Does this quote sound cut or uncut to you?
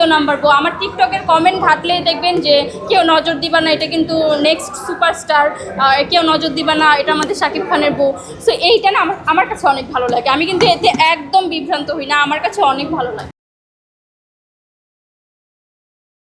uncut